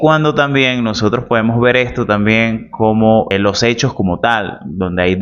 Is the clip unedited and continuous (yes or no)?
no